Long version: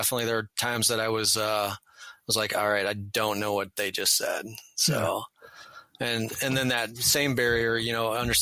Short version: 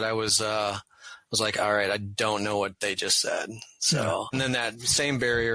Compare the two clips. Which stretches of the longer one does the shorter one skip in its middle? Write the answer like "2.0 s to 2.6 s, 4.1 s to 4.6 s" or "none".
5.3 s to 6.5 s